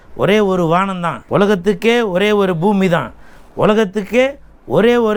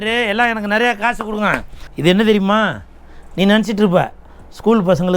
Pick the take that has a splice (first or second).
second